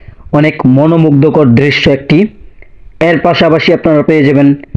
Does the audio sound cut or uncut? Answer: uncut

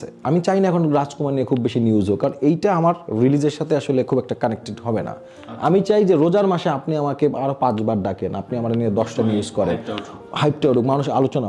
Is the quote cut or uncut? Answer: uncut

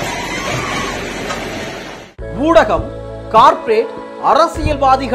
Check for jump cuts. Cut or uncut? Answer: cut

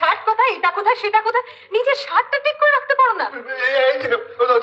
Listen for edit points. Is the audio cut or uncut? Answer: uncut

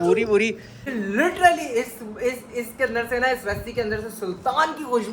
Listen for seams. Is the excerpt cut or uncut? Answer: cut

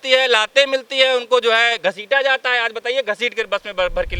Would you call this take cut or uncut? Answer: uncut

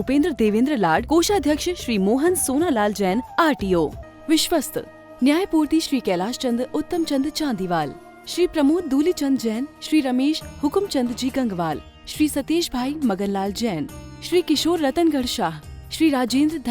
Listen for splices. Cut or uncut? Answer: cut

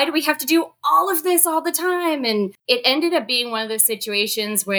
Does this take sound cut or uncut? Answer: cut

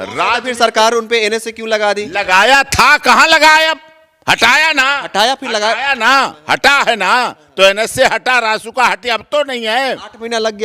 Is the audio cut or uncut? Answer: uncut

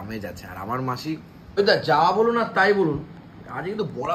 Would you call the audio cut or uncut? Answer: cut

